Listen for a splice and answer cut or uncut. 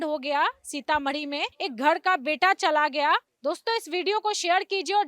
cut